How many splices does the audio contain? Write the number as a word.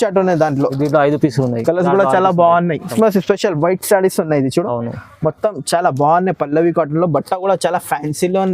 one